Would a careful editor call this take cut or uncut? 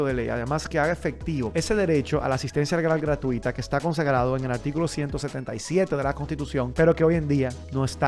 uncut